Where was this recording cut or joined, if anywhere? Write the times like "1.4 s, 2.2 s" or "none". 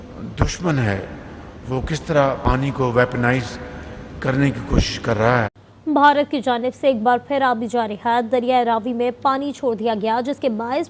5.6 s